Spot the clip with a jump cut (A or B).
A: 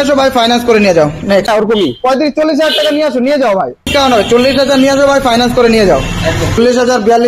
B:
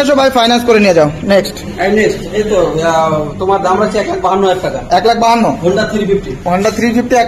A